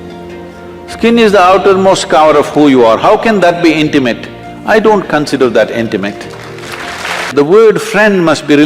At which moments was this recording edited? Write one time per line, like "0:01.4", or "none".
0:07.3